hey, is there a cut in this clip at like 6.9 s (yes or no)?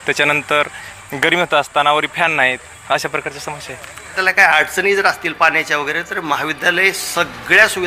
no